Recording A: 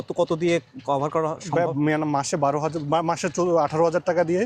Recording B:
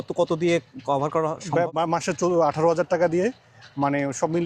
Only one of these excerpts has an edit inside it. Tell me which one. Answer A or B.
B